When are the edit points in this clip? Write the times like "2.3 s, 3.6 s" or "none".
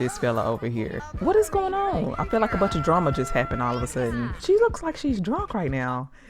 1.0 s, 4.3 s